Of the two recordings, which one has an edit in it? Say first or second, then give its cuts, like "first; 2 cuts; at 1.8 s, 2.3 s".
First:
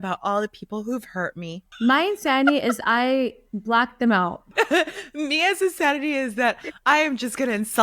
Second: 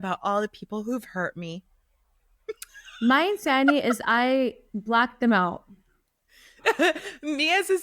first; 2 cuts; at 1.6 s, 4.4 s